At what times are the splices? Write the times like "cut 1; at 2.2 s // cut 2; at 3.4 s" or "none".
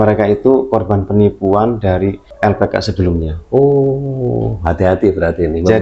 cut 1; at 2.3 s